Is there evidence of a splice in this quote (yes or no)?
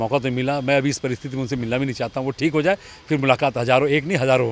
no